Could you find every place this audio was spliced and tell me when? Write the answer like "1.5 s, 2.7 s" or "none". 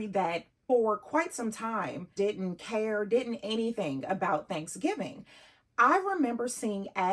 none